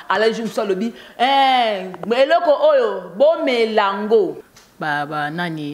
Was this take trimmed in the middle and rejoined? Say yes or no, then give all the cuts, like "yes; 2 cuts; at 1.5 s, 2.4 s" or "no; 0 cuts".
yes; 1 cut; at 4.4 s